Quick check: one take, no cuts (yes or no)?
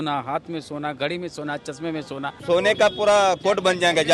no